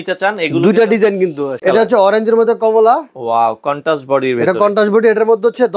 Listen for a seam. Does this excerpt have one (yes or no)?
yes